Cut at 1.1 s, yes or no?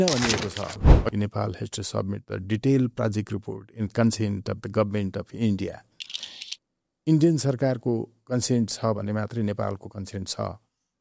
yes